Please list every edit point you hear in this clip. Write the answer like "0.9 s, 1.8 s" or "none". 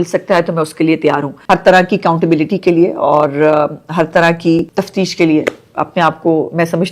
1.4 s, 4.7 s